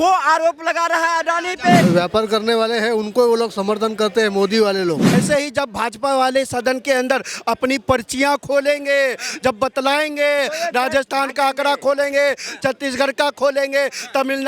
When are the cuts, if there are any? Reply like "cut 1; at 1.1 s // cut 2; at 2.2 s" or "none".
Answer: cut 1; at 1.8 s // cut 2; at 5.1 s